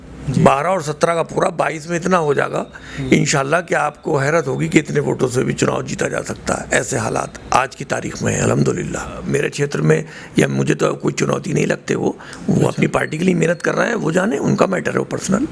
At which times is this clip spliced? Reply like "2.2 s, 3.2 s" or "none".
9.2 s